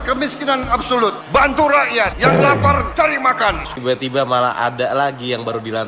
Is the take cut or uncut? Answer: cut